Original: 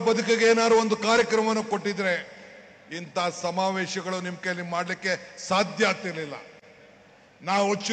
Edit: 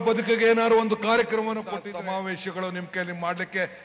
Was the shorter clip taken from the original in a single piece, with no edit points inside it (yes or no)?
no